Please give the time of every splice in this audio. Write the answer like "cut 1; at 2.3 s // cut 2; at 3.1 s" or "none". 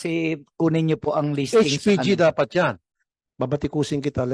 cut 1; at 2.9 s